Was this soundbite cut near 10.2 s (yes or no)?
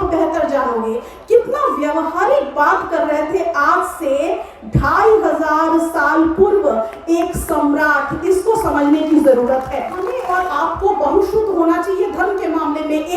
yes